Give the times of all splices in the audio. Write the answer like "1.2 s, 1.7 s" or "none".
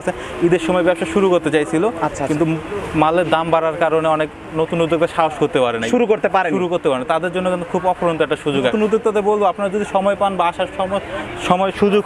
8.7 s